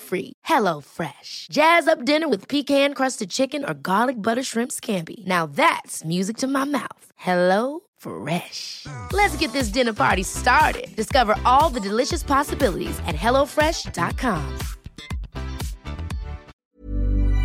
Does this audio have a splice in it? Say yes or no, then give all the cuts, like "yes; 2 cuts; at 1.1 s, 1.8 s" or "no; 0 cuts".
yes; 1 cut; at 16.5 s